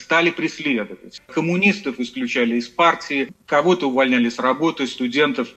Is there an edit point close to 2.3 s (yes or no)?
no